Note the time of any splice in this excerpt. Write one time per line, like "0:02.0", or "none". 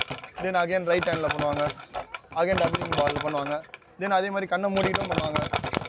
none